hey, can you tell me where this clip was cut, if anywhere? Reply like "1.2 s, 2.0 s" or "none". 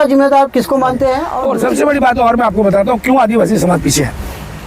1.3 s